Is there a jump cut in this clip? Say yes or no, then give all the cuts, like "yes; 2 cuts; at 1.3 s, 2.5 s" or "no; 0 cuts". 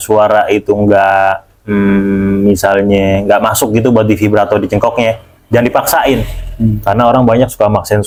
no; 0 cuts